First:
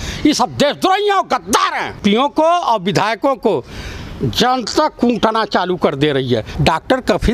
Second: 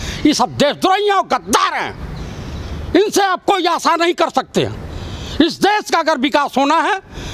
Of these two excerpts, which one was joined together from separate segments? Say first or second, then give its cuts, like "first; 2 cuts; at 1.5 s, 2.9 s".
first; 2 cuts; at 2.0 s, 6.5 s